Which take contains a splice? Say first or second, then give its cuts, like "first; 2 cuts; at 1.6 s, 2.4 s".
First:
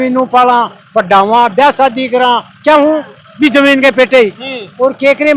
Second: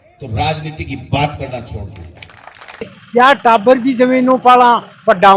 second; 1 cut; at 2.8 s